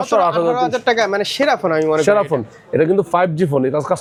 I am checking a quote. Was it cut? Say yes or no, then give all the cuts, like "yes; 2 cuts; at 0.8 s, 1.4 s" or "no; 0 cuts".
no; 0 cuts